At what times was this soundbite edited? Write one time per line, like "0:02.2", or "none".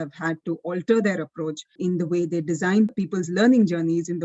0:01.7
0:02.9